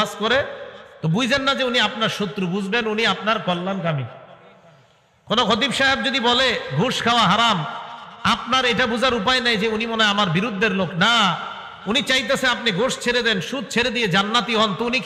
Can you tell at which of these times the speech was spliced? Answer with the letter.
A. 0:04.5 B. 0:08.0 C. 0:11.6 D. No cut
D